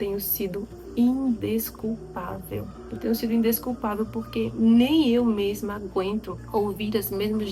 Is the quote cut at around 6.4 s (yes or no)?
yes